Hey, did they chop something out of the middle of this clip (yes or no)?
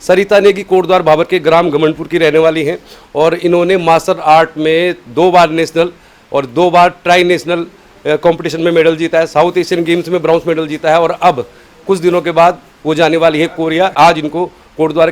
yes